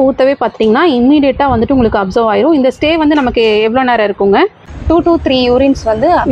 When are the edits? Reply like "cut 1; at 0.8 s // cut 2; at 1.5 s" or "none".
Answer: none